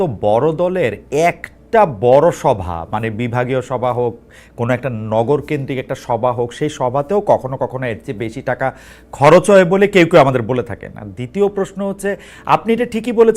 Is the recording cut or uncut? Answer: uncut